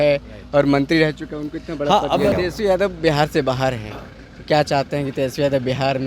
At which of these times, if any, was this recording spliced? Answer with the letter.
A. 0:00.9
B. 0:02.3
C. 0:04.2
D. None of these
B